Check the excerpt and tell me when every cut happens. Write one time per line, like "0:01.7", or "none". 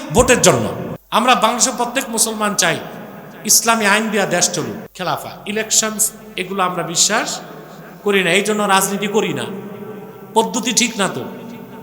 0:00.9
0:04.9

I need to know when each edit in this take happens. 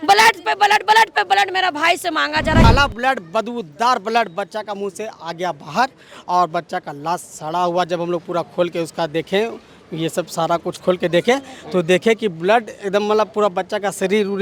0:02.6

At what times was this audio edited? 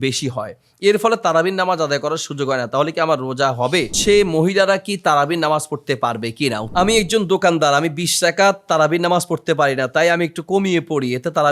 0:03.9
0:06.7

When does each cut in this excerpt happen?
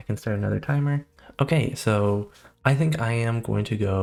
none

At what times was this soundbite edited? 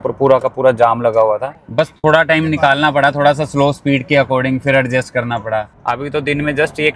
0:01.6
0:05.7

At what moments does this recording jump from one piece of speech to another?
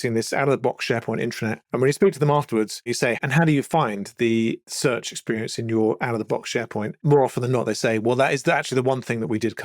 0:01.6
0:03.2
0:04.6
0:07.0

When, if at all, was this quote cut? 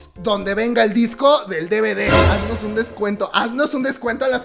0:02.2

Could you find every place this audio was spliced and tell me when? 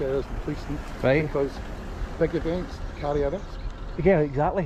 none

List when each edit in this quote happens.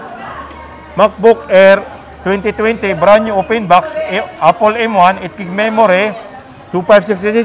none

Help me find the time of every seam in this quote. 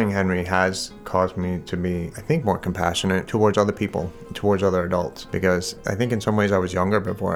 0:02.1
0:03.3
0:05.2
0:05.8

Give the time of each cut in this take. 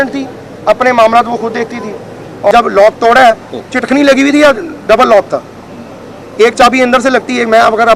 0:02.5

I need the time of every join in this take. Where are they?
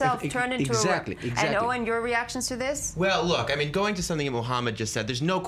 0:02.9

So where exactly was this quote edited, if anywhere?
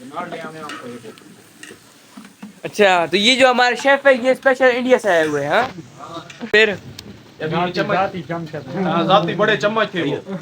0:06.4

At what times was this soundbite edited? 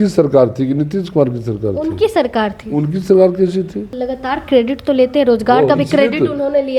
0:03.9

